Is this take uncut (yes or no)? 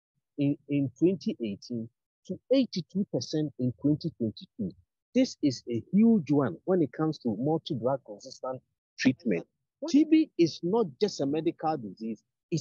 no